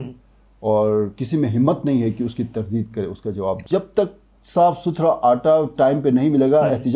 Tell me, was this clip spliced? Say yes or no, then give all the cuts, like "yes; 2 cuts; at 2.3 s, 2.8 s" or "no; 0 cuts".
yes; 1 cut; at 3.7 s